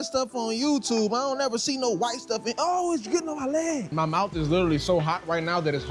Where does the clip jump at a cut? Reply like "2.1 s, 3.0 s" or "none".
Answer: 3.9 s